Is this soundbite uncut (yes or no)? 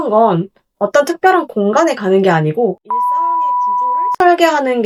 yes